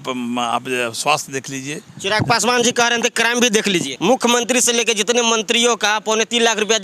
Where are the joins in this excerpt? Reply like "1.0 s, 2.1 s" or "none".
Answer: 3.9 s